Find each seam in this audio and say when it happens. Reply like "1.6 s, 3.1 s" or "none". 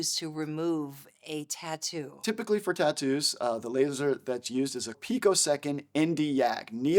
2.2 s, 5.0 s